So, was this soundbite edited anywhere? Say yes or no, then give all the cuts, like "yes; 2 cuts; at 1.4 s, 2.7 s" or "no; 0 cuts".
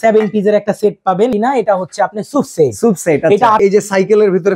yes; 2 cuts; at 1.3 s, 3.6 s